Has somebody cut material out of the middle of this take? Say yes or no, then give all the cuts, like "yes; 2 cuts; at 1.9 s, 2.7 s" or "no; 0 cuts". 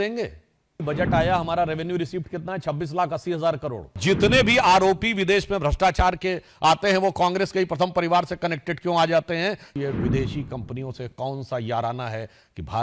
yes; 3 cuts; at 0.8 s, 4.0 s, 9.7 s